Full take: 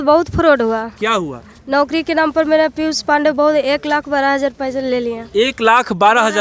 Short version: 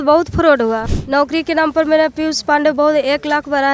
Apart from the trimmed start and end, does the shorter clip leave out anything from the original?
yes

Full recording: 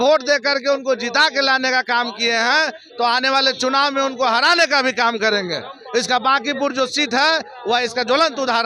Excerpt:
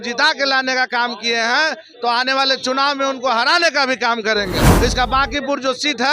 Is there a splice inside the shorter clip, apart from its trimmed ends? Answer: yes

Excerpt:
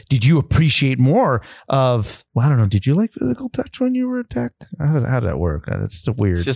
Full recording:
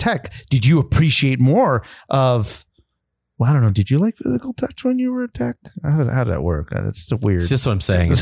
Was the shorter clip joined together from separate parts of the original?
yes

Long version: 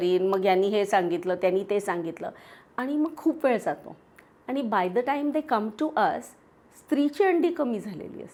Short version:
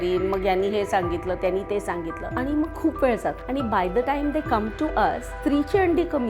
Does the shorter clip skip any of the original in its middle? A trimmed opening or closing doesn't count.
yes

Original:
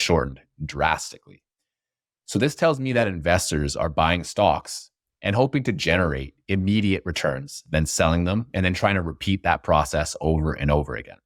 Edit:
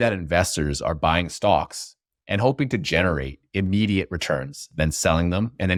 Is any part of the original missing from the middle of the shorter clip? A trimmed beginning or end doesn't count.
no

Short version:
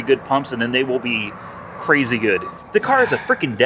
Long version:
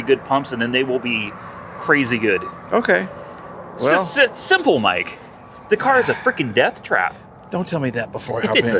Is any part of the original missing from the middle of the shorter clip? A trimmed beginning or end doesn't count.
yes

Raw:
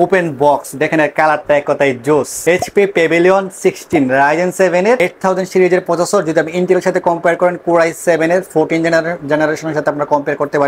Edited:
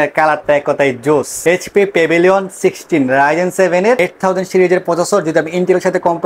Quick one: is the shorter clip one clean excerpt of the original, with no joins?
yes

